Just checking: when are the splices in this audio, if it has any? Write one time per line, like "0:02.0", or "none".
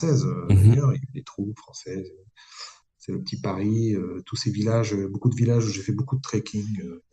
none